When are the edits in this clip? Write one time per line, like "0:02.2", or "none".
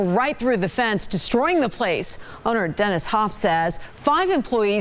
none